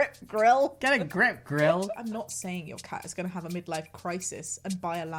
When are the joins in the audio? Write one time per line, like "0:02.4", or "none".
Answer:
0:01.9